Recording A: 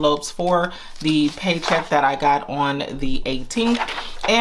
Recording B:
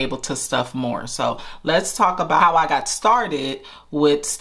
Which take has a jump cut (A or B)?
B